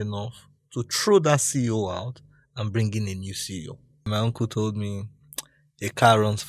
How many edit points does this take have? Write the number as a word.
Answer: one